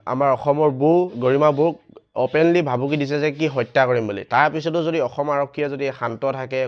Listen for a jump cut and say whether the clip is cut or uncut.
cut